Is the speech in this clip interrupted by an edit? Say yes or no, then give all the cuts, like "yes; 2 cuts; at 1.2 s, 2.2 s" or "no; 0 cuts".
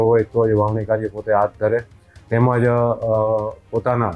no; 0 cuts